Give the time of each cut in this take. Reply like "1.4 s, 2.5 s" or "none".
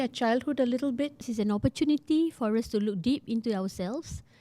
1.3 s